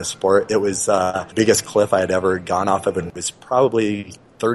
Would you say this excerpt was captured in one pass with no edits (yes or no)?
no